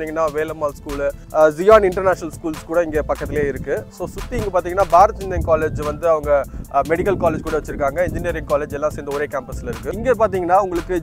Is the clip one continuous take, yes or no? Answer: no